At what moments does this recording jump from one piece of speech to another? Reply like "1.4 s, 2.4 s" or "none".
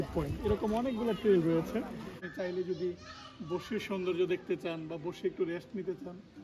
2.2 s